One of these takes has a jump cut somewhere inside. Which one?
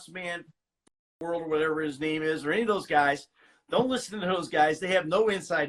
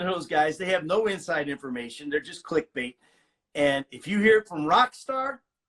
second; 1 cut; at 3.0 s

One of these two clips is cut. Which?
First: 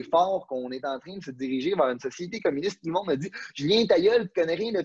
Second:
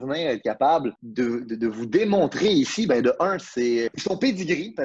second; 2 cuts; at 1.0 s, 4.0 s

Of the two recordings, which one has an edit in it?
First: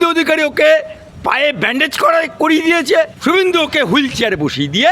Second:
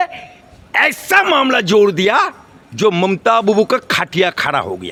first; 2 cuts; at 1.0 s, 3.1 s

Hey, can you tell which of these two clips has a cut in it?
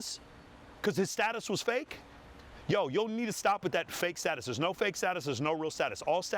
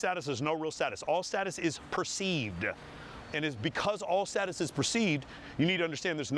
second; 1 cut; at 3.1 s

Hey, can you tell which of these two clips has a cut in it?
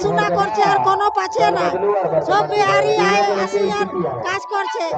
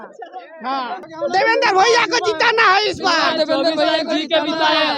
second; 1 cut; at 0.9 s

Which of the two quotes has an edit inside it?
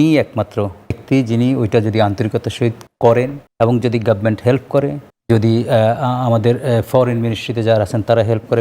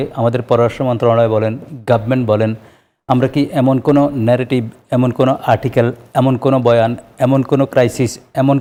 first; 4 cuts; at 1.0 s, 2.9 s, 3.4 s, 5.1 s

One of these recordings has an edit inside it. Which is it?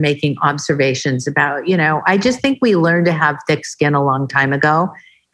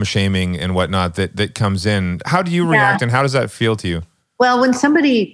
second; 1 cut; at 2.3 s

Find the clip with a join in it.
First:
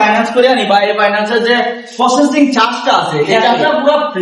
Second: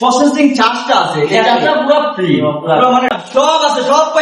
second; 1 cut; at 3.2 s

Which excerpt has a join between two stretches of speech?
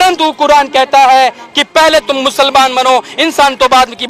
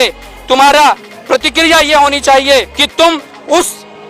second; 1 cut; at 2.8 s

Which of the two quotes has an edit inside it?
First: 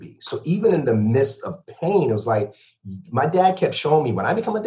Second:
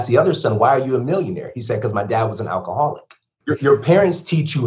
second; 1 cut; at 3.4 s

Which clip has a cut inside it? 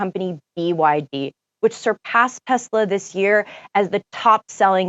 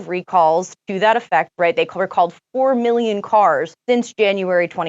second; 1 cut; at 3.7 s

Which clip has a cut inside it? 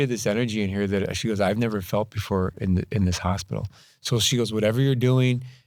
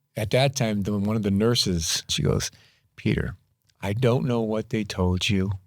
second; 1 cut; at 2.1 s

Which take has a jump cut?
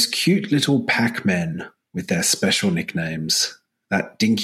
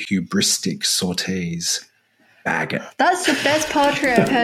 second; 1 cut; at 2.9 s

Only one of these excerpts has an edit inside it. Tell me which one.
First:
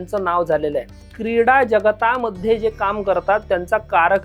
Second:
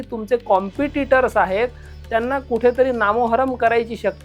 first; 1 cut; at 1.1 s

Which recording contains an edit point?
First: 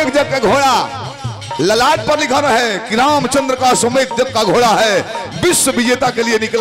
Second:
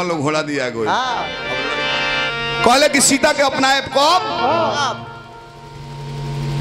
second; 1 cut; at 1.4 s

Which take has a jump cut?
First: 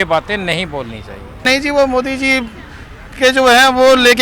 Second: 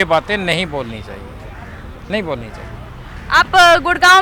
first; 1 cut; at 1.4 s

